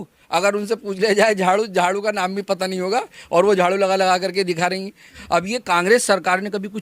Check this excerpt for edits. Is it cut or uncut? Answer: cut